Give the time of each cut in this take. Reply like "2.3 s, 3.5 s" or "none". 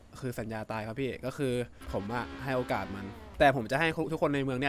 1.8 s, 3.2 s